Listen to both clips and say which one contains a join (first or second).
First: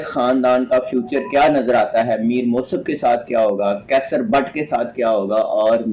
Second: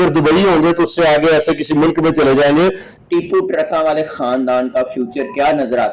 second